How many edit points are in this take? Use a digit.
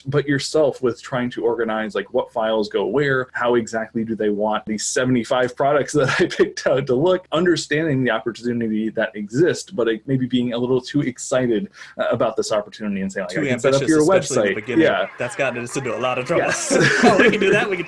4